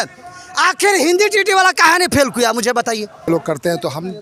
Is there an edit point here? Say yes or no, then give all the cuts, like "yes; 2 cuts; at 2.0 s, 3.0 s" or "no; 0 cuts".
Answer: yes; 1 cut; at 3.3 s